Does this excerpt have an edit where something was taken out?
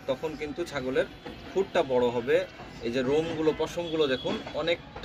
no; 0 cuts

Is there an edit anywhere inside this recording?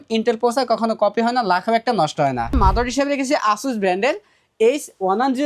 yes; 1 cut; at 2.6 s

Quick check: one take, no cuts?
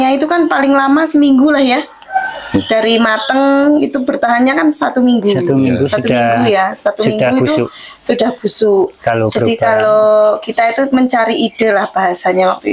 yes; 0 cuts

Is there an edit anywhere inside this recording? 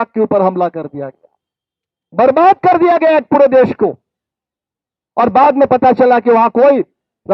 no; 0 cuts

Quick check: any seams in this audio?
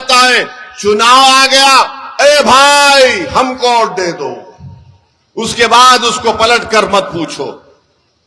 no; 0 cuts

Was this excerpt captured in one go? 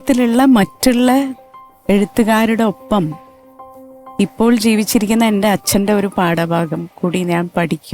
yes; 0 cuts

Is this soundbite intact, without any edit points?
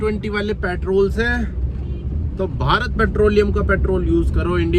yes; 0 cuts

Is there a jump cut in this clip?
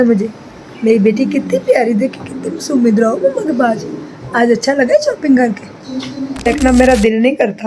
yes; 1 cut; at 6.5 s

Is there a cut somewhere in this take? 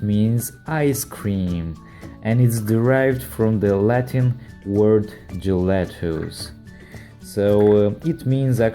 yes; 1 cut; at 4.9 s

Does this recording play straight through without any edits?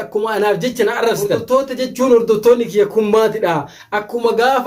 no; 1 cut; at 1.4 s

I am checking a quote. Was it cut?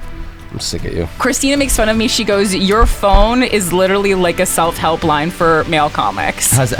yes; 1 cut; at 1.2 s

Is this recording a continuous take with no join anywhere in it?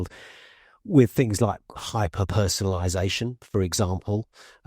no; 1 cut; at 1.8 s

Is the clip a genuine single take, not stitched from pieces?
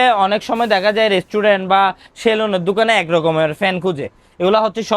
yes; 0 cuts

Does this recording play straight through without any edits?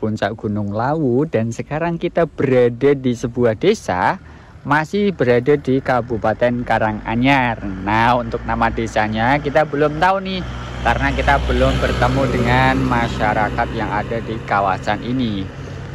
yes; 0 cuts

